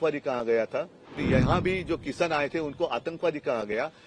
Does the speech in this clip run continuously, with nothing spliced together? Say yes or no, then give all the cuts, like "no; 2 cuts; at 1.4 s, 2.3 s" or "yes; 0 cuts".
no; 1 cut; at 1.2 s